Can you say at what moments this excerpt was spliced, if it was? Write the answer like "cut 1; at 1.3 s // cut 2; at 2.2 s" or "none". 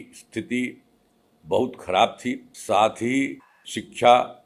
cut 1; at 2.5 s